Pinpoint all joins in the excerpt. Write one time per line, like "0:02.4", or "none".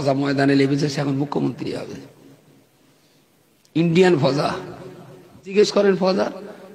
0:05.5